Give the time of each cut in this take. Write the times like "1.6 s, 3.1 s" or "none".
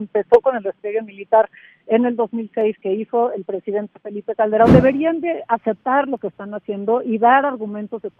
4.7 s